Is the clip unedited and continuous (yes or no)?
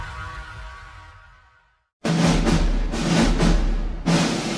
no